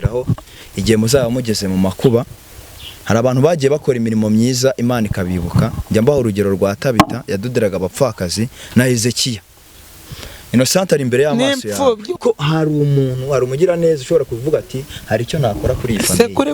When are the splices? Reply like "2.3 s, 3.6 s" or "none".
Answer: 12.2 s